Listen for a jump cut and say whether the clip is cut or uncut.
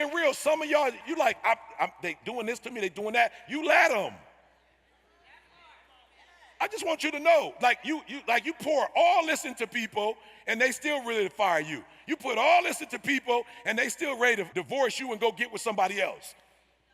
cut